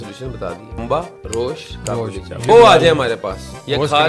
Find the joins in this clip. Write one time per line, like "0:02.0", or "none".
0:00.8
0:02.5